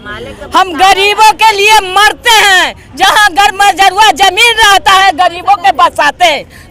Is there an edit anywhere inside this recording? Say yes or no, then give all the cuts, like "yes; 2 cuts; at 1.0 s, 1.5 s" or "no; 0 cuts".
no; 0 cuts